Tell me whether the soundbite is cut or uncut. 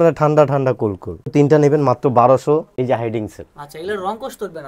cut